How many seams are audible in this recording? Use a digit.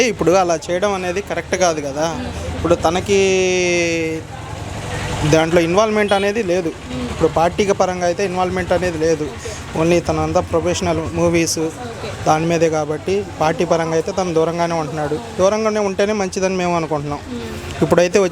0